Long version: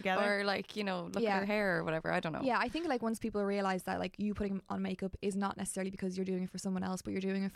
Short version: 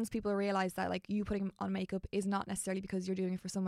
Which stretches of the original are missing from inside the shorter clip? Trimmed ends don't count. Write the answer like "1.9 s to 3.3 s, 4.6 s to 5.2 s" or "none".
none

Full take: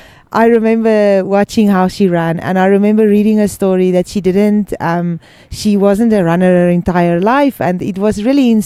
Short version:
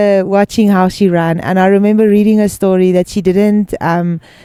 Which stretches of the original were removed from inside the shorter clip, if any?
none

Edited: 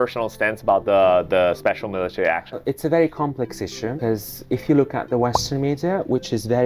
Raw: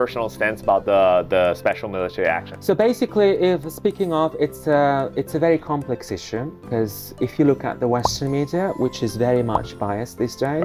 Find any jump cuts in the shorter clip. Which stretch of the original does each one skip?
2.6 s to 5.1 s, 6.4 s to 6.6 s

